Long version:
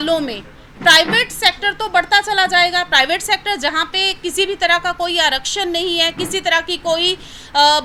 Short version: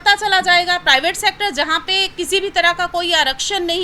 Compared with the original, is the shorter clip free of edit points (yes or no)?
yes